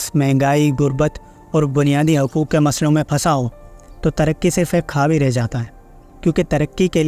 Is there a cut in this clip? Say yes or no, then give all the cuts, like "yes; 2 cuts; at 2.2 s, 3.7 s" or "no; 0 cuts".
no; 0 cuts